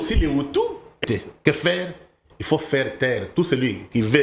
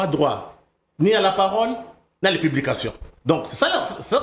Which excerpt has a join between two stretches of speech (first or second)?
first